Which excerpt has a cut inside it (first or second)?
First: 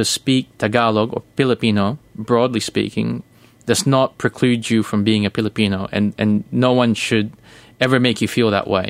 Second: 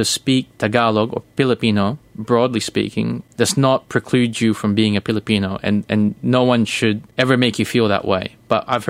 second